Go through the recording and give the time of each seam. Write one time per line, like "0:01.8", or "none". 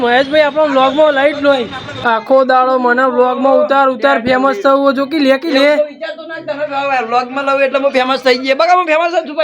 0:02.0